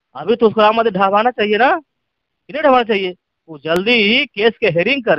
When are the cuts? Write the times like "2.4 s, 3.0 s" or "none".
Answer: none